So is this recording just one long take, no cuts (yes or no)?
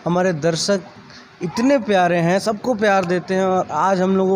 yes